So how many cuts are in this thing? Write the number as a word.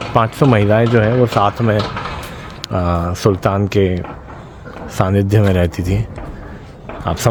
zero